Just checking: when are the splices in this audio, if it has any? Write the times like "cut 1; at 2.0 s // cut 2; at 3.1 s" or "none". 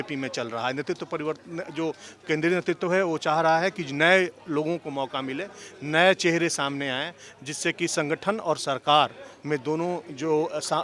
none